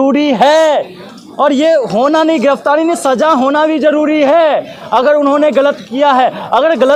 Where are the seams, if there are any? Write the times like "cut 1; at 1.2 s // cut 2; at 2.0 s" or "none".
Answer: none